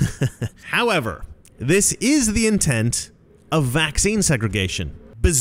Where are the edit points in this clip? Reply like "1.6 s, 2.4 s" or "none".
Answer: none